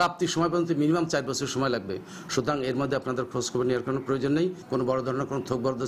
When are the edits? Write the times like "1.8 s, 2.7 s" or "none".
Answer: none